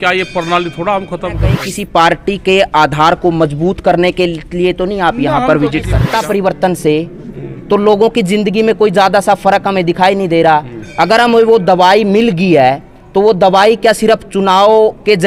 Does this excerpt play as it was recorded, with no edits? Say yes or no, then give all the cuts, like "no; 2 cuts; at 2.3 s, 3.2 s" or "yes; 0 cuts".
no; 2 cuts; at 1.7 s, 6.0 s